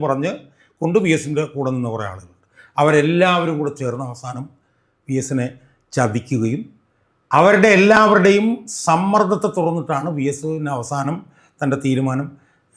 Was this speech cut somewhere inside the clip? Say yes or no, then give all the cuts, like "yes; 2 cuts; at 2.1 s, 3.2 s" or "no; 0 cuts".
no; 0 cuts